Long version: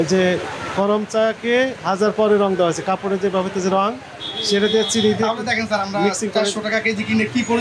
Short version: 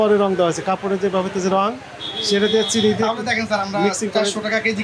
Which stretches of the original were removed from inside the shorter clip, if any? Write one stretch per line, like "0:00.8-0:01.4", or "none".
none